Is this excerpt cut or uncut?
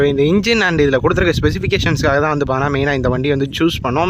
uncut